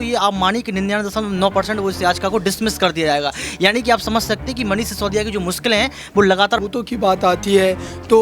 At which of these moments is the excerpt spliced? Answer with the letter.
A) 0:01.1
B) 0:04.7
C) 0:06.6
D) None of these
C